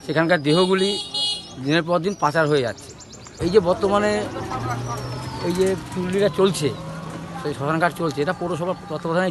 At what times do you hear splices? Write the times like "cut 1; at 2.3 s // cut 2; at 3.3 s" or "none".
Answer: cut 1; at 3.2 s